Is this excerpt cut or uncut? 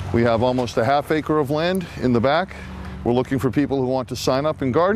uncut